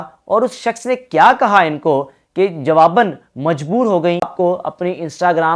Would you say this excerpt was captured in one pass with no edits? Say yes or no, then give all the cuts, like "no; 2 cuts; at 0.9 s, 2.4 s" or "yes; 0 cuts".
no; 1 cut; at 4.3 s